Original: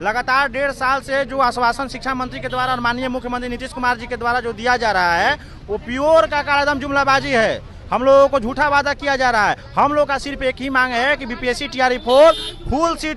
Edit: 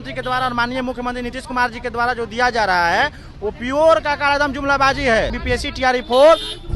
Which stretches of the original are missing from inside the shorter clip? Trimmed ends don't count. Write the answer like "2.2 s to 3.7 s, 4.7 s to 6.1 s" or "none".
7.6 s to 11.3 s

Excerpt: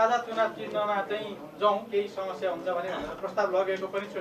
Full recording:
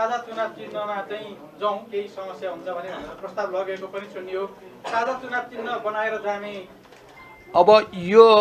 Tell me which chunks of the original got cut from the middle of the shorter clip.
none

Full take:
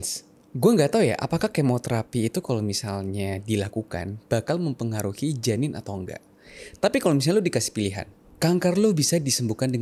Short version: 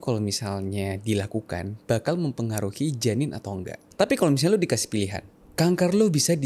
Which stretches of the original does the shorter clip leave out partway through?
6.2 s to 6.6 s

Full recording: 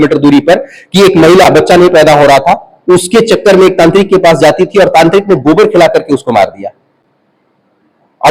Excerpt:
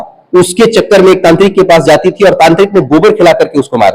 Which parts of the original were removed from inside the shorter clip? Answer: none

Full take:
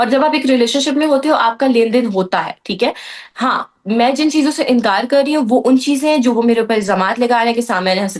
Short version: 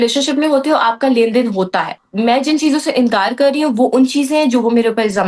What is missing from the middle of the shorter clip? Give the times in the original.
2.6 s to 3.7 s

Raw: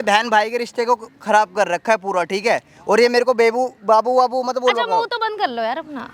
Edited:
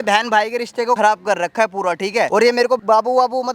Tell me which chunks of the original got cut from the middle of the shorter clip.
1.0 s to 1.3 s, 2.9 s to 3.6 s

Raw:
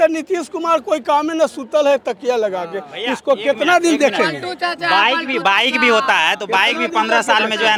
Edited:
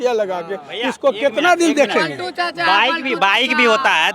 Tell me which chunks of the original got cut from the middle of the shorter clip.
none

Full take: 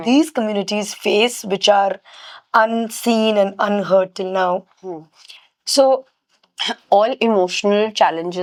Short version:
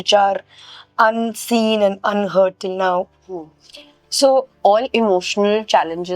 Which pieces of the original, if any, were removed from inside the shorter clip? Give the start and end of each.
6.1 s to 6.8 s

